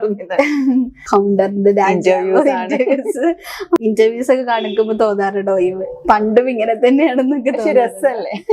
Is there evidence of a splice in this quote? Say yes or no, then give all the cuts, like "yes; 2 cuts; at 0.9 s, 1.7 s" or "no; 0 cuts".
yes; 2 cuts; at 1.0 s, 3.8 s